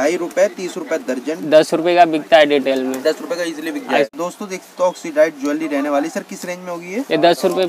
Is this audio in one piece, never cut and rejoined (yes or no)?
no